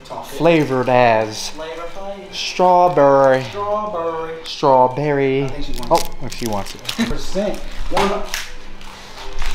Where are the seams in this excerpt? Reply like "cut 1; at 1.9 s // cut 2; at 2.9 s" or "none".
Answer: cut 1; at 7.1 s

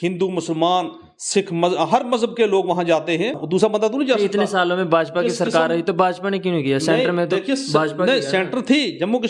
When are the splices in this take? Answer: cut 1; at 3.4 s

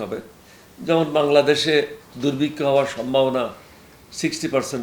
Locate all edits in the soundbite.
none

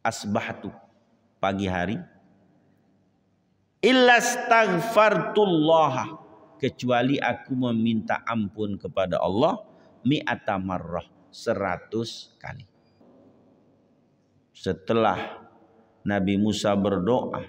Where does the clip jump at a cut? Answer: cut 1; at 13.0 s

